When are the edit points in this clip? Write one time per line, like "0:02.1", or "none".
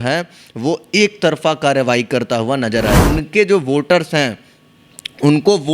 0:03.0